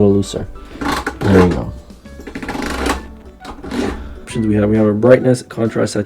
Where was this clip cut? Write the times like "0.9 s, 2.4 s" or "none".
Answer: 4.3 s